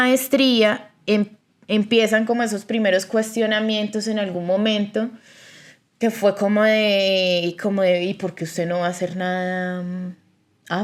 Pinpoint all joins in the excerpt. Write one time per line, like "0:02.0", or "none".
none